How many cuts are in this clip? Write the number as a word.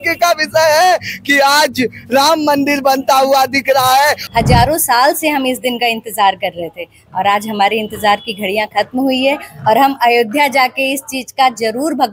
one